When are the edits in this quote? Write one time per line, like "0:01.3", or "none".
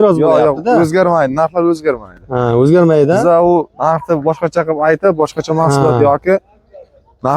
none